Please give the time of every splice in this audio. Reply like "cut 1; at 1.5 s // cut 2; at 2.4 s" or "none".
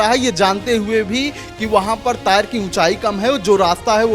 none